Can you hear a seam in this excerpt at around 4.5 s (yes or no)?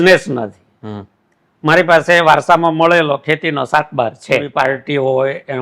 yes